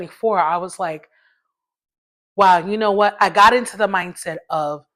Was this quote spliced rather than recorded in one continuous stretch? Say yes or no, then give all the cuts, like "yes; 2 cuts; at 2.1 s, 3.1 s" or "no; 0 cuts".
no; 0 cuts